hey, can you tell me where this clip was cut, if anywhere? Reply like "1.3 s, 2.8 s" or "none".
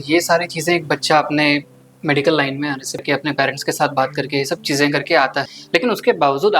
3.0 s, 5.5 s